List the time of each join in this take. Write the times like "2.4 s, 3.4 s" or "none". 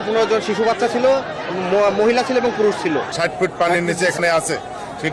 3.1 s